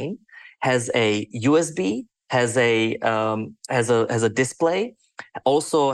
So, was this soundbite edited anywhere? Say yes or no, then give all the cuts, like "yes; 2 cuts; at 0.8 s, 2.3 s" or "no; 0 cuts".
no; 0 cuts